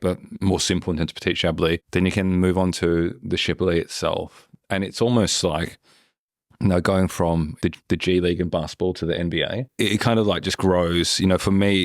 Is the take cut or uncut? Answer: cut